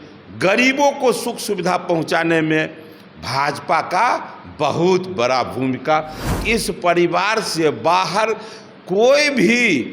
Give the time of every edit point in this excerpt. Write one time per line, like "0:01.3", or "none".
0:06.4